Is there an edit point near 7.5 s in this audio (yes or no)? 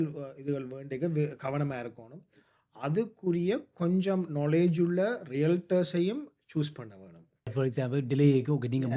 yes